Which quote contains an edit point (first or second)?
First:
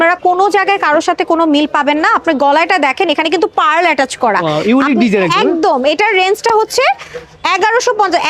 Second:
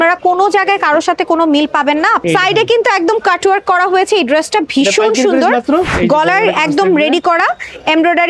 second